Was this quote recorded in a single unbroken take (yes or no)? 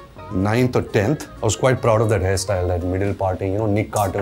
no